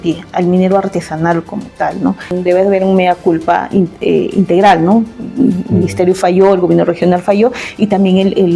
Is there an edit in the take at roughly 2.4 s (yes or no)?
yes